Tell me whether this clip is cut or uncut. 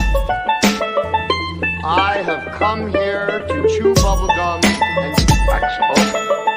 cut